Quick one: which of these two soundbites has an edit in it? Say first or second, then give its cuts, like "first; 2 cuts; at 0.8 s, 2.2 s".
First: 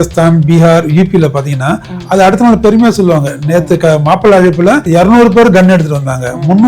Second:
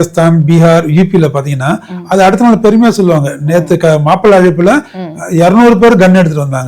first; 1 cut; at 4.8 s